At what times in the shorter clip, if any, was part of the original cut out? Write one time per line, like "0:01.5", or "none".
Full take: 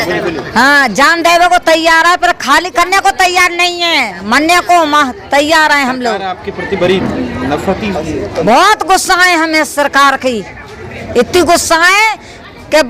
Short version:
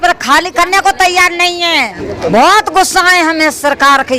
0:02.0